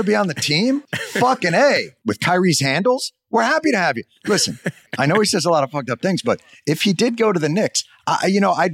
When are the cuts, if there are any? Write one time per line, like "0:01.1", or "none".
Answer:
0:01.9